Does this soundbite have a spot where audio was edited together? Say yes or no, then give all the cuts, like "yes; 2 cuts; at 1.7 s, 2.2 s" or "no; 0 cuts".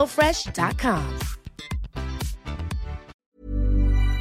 yes; 1 cut; at 3.2 s